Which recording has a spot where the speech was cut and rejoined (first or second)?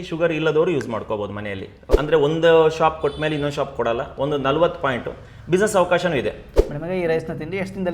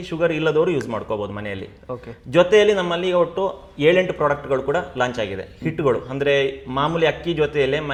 first